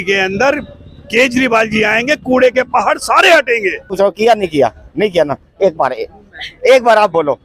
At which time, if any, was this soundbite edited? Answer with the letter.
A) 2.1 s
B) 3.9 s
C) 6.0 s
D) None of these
B